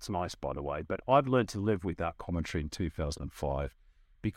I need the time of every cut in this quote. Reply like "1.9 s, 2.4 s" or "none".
none